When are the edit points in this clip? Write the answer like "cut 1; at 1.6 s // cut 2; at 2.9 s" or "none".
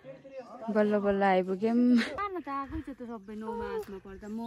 cut 1; at 2.2 s